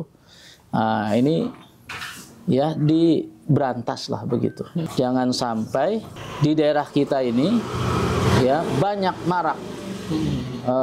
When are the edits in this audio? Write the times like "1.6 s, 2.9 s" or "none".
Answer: 4.9 s, 6.2 s